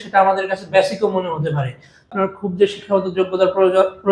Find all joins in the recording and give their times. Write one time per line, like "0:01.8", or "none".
0:02.1